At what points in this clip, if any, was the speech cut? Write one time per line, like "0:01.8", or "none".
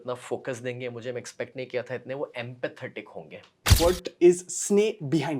0:03.6